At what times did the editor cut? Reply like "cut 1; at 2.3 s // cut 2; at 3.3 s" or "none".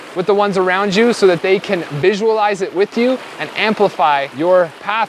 none